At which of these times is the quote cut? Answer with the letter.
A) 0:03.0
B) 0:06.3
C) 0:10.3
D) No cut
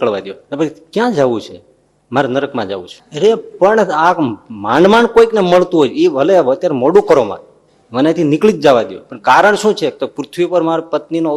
A